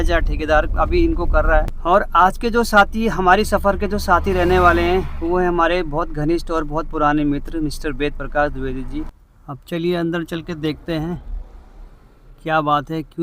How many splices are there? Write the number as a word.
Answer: two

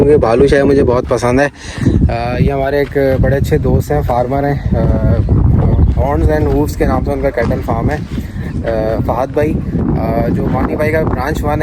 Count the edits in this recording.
zero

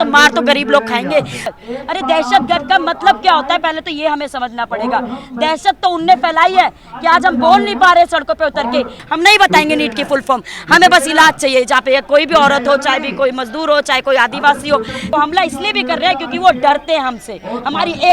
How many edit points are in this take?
three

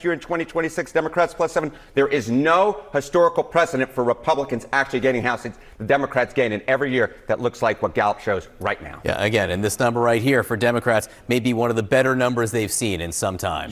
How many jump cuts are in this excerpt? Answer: zero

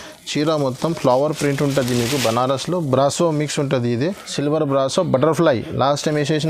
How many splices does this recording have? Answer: one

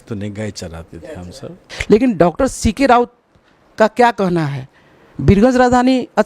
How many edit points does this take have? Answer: one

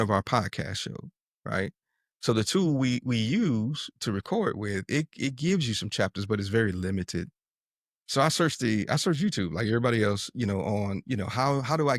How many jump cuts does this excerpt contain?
zero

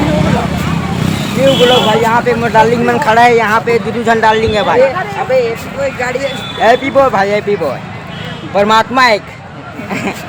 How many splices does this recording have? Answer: zero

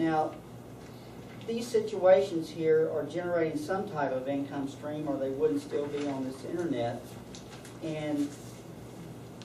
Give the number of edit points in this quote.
one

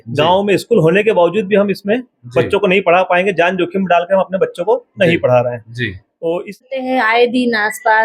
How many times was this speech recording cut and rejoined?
one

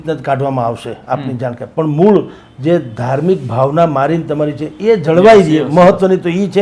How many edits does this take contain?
zero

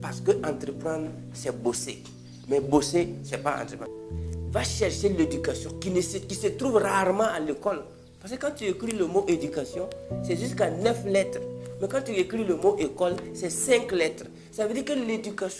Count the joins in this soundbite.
one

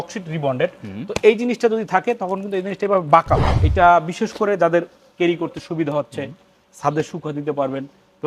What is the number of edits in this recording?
one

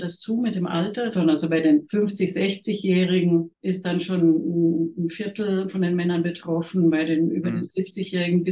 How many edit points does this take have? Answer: five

